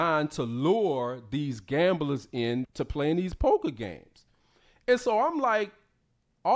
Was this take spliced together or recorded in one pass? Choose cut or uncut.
uncut